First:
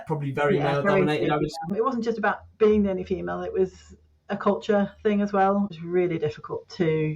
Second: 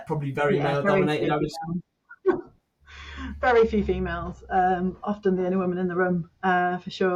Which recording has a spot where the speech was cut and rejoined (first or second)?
first